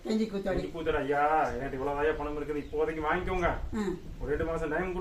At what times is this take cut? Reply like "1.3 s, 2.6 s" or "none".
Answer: none